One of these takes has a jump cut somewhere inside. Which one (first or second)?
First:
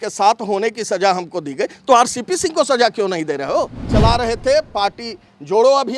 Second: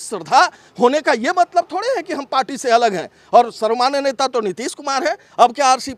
first